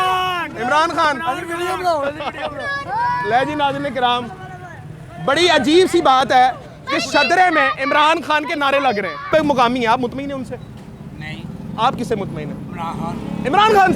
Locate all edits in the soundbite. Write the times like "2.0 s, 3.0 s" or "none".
9.3 s